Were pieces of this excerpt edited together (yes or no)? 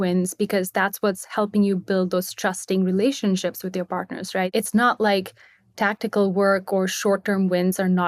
yes